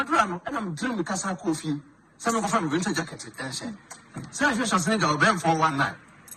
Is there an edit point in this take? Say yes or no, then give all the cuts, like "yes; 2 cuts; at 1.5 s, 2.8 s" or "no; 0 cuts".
no; 0 cuts